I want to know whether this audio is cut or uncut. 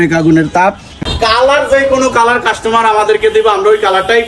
cut